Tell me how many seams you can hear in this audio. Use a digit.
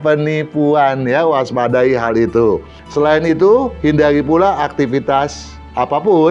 1